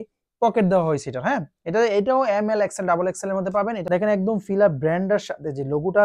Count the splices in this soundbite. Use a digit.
1